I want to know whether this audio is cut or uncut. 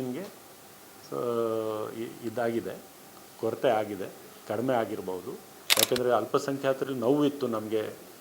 cut